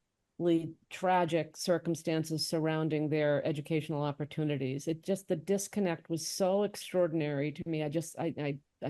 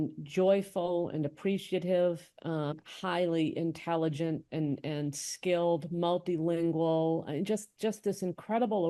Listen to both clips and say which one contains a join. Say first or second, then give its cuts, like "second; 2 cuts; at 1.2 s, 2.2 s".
second; 1 cut; at 2.7 s